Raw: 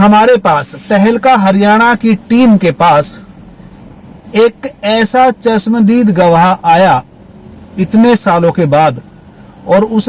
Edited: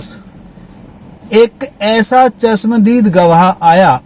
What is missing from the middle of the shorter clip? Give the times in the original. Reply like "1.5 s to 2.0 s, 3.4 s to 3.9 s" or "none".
none